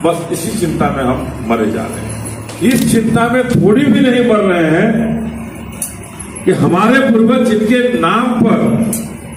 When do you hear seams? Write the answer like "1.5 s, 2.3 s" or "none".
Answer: 2.4 s